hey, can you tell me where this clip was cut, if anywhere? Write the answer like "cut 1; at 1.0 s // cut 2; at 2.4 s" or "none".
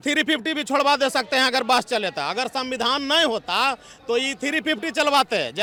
none